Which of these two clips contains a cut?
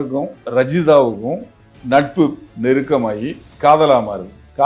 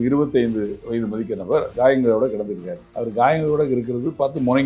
second; 1 cut; at 1.7 s

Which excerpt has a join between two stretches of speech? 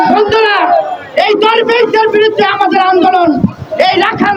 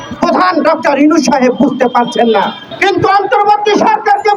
second; 1 cut; at 2.6 s

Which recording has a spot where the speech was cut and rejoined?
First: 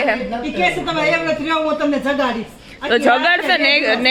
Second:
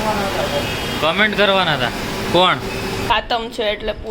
second; 1 cut; at 3.1 s

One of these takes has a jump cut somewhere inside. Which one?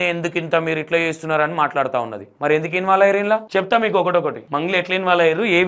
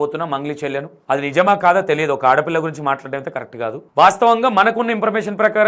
first; 3 cuts; at 2.2 s, 3.5 s, 4.4 s

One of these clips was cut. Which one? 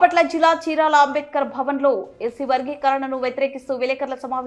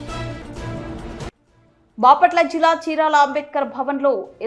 second; 1 cut; at 1.3 s

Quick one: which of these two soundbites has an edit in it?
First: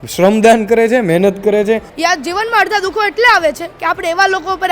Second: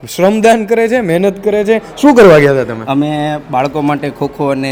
first; 1 cut; at 1.9 s

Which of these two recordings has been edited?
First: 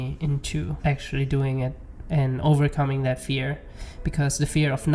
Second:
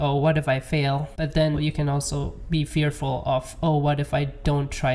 second; 1 cut; at 1.6 s

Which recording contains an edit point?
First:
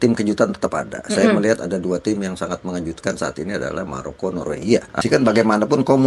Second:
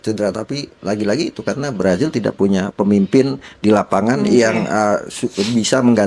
first; 1 cut; at 5.0 s

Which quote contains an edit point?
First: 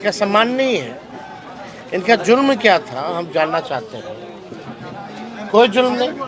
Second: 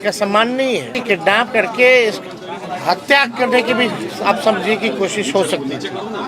second; 1 cut; at 1.0 s

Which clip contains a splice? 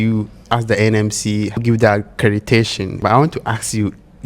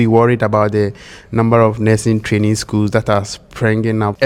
first; 1 cut; at 3.0 s

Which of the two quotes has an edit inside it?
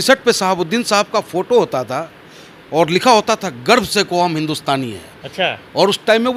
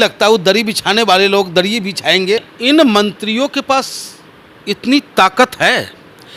second; 1 cut; at 2.5 s

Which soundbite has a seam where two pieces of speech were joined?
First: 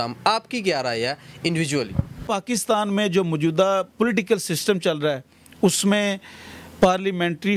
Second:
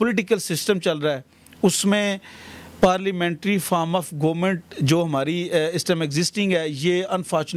first; 1 cut; at 2.2 s

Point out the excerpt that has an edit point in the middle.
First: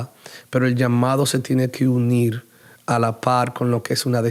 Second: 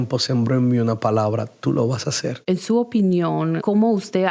second; 1 cut; at 2.3 s

